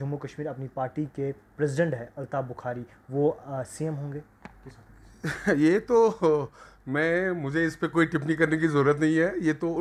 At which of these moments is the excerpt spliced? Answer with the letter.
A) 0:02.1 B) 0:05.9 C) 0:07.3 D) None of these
D